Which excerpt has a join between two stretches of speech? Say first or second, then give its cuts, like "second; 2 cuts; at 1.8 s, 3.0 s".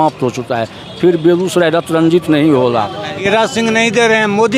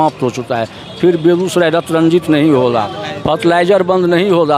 first; 1 cut; at 3.1 s